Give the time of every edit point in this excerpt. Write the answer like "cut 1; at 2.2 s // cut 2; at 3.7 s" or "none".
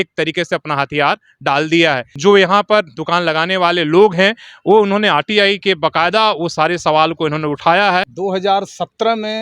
cut 1; at 2.1 s // cut 2; at 8.1 s